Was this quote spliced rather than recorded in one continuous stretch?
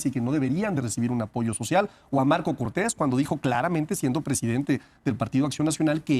no; 0 cuts

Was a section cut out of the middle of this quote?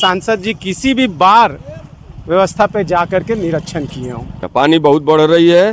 yes; 1 cut; at 4.4 s

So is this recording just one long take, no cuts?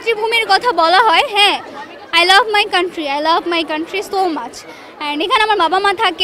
yes; 0 cuts

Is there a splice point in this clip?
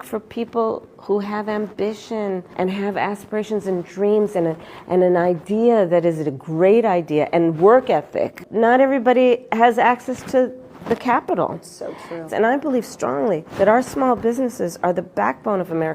yes; 3 cuts; at 2.5 s, 8.4 s, 13.5 s

